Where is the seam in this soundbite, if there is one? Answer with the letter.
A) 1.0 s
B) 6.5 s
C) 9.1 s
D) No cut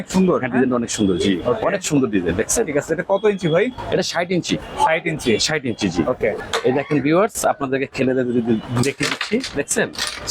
B